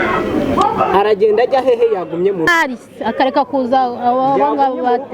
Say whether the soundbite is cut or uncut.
cut